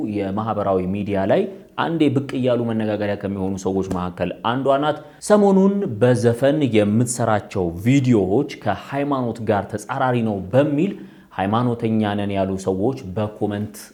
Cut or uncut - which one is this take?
uncut